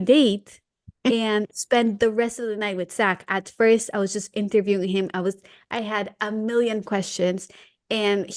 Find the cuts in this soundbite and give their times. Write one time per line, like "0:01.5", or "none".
none